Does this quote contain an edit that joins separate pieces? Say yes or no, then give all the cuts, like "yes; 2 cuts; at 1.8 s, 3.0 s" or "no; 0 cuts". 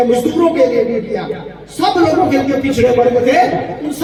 no; 0 cuts